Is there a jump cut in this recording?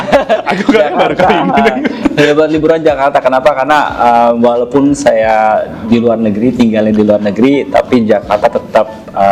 no; 0 cuts

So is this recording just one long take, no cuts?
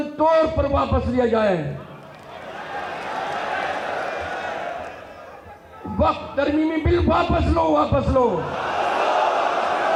yes; 0 cuts

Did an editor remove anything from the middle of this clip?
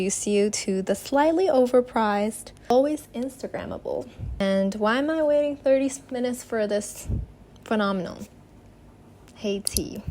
yes; 2 cuts; at 2.7 s, 4.4 s

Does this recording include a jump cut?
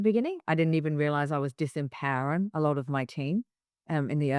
no; 0 cuts

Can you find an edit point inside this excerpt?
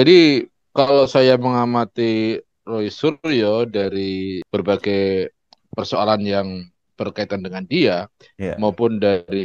yes; 1 cut; at 4.4 s

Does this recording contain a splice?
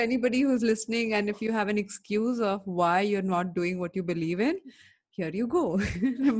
no; 0 cuts

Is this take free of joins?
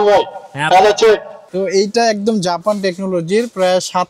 no; 1 cut; at 1.4 s

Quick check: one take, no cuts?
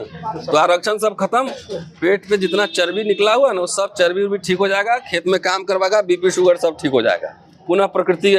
yes; 0 cuts

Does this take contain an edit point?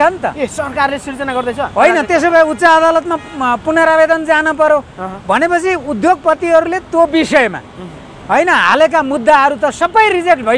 no; 0 cuts

